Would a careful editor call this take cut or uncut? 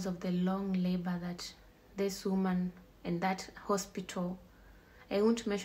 uncut